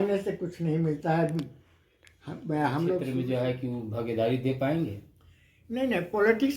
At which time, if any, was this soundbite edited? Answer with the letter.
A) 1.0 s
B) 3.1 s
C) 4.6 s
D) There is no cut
B